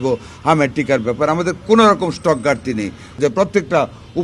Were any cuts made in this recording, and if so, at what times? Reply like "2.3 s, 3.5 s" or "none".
3.2 s

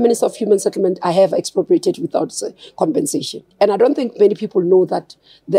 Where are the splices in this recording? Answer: 3.4 s

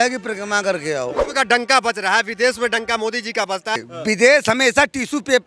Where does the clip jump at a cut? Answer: 1.2 s, 3.8 s

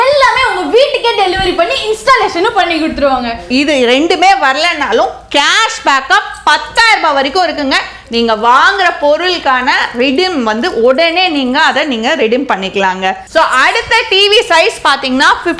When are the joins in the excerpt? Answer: none

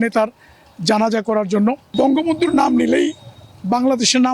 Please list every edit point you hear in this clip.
1.8 s

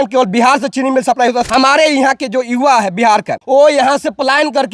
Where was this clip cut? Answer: 1.5 s, 3.3 s

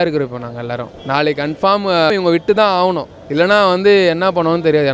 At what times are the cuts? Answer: 0.9 s, 2.1 s, 3.1 s

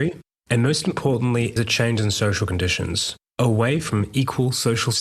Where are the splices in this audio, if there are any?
1.6 s, 3.9 s

